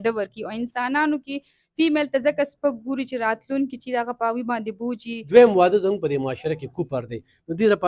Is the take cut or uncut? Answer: cut